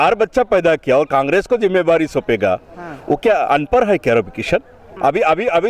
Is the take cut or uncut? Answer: cut